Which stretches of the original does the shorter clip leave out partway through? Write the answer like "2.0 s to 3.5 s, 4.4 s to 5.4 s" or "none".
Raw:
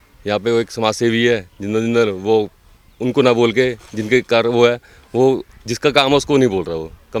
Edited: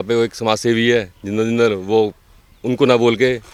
none